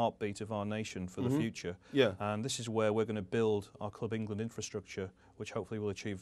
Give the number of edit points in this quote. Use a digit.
1